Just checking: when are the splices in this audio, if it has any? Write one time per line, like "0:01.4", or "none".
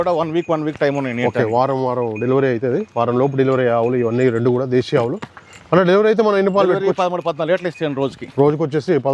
none